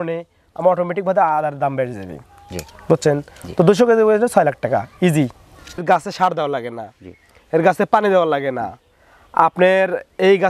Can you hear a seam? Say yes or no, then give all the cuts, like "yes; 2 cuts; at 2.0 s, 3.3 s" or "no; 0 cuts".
yes; 1 cut; at 5.8 s